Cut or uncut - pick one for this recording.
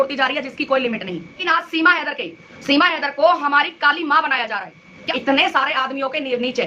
cut